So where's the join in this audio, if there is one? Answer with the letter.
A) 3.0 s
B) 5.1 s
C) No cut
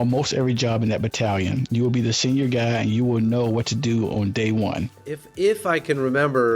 B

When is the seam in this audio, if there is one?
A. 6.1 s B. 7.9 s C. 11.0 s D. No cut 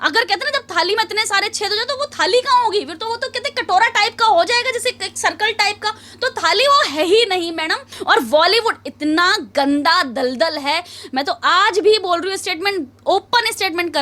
B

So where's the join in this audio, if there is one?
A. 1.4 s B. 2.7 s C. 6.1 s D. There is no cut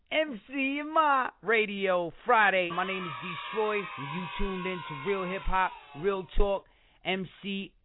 B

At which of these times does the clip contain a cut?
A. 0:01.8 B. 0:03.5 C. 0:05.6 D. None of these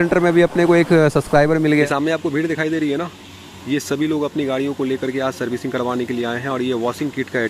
A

